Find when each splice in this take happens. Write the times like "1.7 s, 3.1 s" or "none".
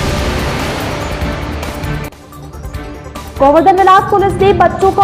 2.2 s